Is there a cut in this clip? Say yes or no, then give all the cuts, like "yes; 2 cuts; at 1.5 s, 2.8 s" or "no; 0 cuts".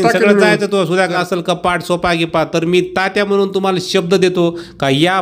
yes; 1 cut; at 1.1 s